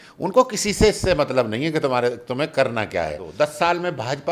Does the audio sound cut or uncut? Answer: cut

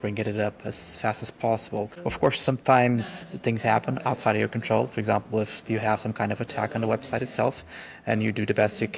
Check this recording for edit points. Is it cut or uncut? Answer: cut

